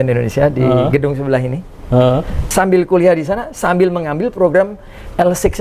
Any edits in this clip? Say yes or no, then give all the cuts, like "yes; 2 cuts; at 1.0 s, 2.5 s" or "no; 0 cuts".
yes; 1 cut; at 2.4 s